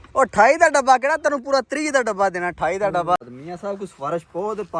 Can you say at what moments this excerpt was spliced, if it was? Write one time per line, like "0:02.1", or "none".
0:03.2